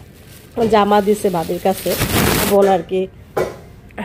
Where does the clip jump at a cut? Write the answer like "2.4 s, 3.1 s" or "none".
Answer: 2.5 s